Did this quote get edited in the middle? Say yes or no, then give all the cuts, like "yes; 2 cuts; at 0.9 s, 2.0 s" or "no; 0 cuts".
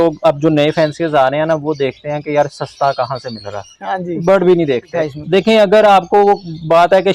yes; 1 cut; at 4.9 s